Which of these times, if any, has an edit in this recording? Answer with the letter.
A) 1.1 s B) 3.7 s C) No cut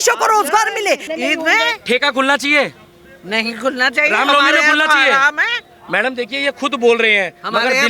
A